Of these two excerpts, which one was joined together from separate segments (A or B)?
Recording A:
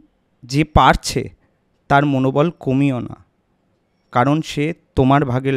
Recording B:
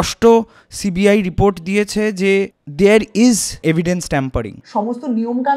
B